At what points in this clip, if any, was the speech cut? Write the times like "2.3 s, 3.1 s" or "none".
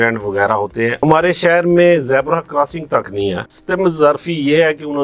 1.0 s, 3.5 s